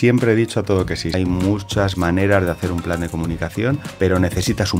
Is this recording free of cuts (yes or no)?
no